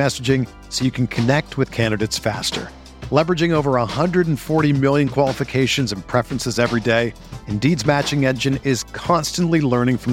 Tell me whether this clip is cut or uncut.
uncut